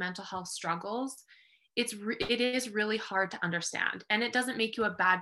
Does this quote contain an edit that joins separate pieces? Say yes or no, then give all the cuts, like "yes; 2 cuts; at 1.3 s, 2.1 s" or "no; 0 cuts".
no; 0 cuts